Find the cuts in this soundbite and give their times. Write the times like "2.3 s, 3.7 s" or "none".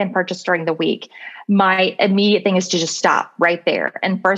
none